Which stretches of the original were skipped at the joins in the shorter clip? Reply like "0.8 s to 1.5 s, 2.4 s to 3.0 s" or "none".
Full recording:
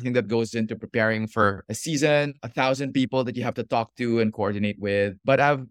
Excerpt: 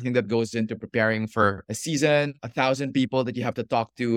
none